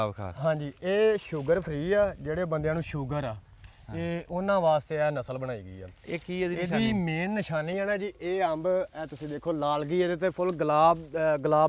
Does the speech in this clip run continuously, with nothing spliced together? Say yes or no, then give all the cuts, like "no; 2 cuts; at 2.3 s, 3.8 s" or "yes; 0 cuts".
yes; 0 cuts